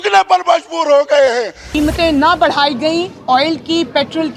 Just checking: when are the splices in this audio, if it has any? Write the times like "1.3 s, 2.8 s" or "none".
1.7 s